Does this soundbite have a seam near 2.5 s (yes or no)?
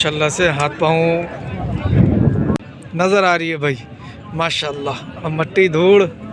yes